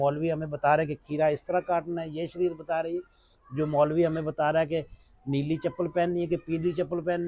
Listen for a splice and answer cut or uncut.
uncut